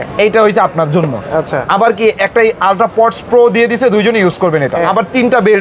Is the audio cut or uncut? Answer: uncut